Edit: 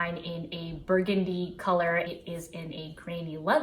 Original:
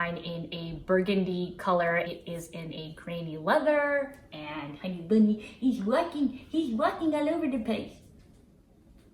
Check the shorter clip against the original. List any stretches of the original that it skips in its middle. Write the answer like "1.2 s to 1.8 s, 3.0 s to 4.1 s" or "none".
none